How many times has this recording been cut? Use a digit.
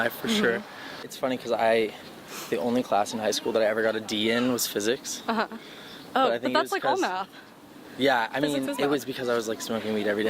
1